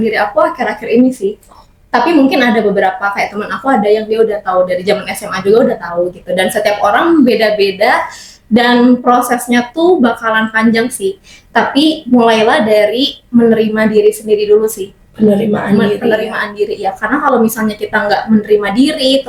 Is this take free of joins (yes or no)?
yes